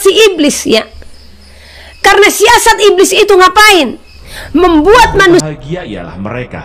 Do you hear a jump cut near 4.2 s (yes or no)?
no